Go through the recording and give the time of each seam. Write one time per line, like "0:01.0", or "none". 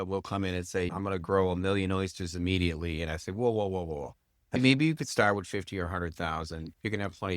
0:00.9
0:04.6